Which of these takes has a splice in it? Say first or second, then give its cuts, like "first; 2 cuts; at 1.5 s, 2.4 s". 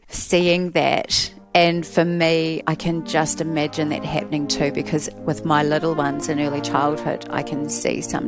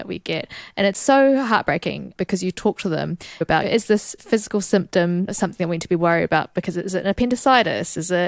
second; 1 cut; at 3.4 s